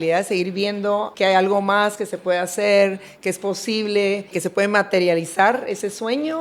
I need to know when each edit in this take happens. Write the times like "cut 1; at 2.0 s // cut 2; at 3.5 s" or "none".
cut 1; at 1.1 s // cut 2; at 4.3 s